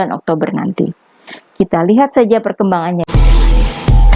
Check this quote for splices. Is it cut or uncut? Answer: cut